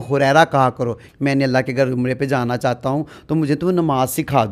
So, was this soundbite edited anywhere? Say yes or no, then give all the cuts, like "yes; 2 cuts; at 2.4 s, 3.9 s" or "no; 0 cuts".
yes; 1 cut; at 1.0 s